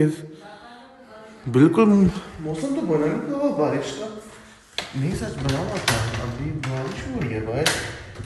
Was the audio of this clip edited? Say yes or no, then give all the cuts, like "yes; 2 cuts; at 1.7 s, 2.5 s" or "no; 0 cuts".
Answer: no; 0 cuts